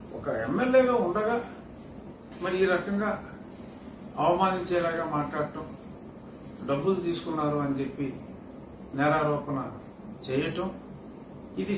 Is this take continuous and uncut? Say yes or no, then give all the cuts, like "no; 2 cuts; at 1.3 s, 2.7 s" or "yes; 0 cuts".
yes; 0 cuts